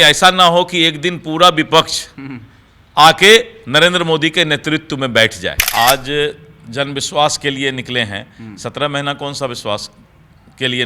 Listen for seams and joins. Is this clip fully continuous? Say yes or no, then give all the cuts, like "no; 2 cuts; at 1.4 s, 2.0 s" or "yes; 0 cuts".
no; 1 cut; at 5.6 s